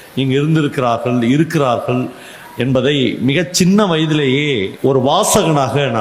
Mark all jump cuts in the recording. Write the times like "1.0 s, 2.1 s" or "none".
4.7 s